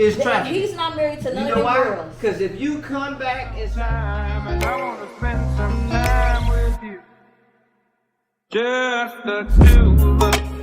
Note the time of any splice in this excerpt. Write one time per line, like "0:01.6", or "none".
0:03.6

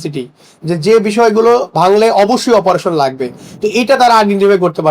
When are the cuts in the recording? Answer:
none

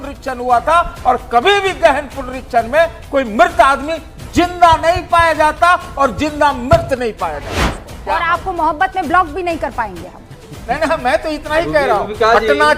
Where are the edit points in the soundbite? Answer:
0:07.6

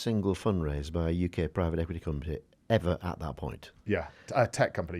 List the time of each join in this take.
0:02.5

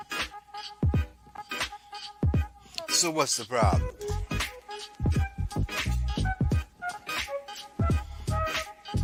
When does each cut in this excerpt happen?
none

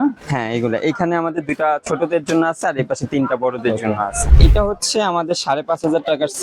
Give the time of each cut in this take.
0:04.4

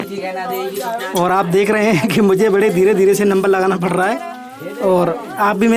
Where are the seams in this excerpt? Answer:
none

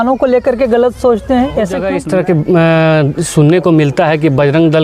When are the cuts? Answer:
0:01.9

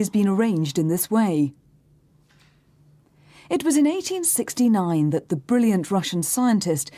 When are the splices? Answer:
0:03.0

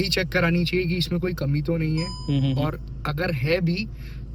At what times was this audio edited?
none

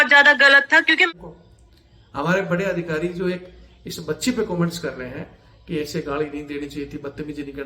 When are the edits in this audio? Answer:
0:01.1

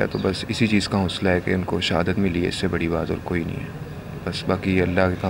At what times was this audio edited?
none

